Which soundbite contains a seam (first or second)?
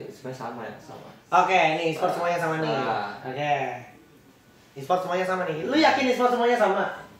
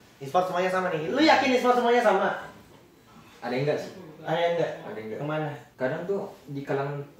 second